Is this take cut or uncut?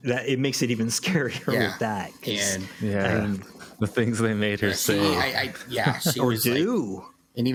uncut